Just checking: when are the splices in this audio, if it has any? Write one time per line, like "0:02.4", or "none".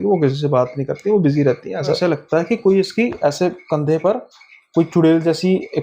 0:02.0